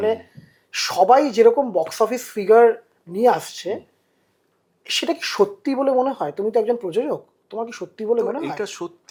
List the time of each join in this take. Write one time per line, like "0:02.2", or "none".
none